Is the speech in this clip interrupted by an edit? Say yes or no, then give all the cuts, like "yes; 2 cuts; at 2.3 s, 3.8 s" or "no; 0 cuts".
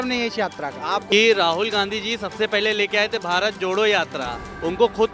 yes; 1 cut; at 1.0 s